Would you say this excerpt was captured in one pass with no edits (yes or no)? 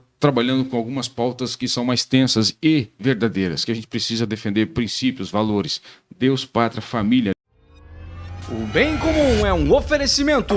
no